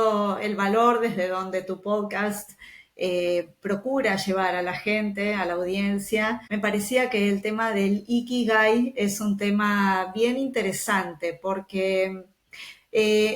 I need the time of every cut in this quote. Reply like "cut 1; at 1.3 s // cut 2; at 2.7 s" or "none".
cut 1; at 6.4 s